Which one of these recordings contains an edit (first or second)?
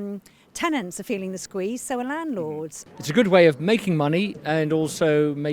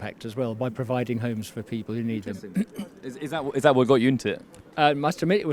first